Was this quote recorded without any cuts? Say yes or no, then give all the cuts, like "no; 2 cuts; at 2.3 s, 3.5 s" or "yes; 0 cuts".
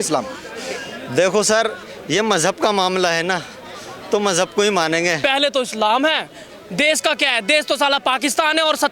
no; 1 cut; at 5.2 s